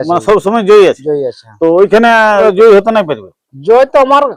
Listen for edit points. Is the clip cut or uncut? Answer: cut